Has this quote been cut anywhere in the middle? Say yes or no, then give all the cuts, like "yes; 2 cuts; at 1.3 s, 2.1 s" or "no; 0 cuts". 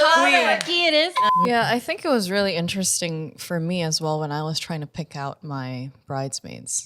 yes; 1 cut; at 1.2 s